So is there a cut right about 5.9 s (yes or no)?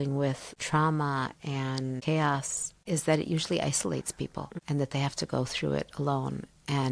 no